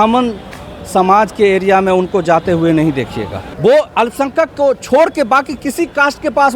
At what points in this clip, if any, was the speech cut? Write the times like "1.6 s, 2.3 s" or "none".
3.4 s